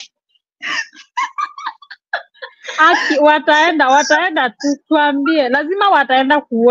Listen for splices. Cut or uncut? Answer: uncut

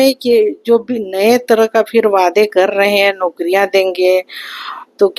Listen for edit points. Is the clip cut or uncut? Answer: uncut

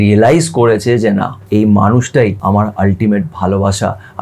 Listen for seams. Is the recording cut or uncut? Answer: cut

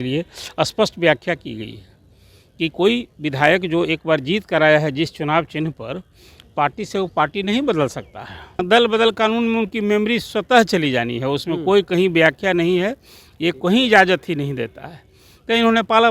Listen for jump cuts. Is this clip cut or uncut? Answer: cut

